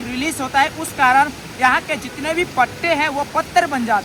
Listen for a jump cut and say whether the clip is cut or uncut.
uncut